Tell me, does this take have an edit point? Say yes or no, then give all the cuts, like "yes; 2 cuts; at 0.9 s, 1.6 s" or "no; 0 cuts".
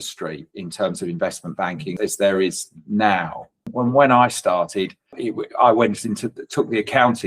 yes; 3 cuts; at 1.9 s, 3.6 s, 5.2 s